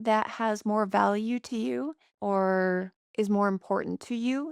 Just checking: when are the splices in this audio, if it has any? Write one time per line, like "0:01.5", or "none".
0:02.0
0:03.0

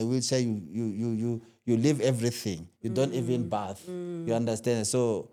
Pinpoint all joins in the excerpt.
none

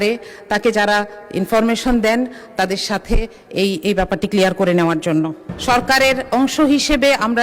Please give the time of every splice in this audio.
0:05.5

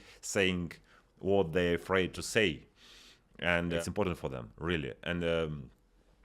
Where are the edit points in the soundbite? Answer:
0:02.2

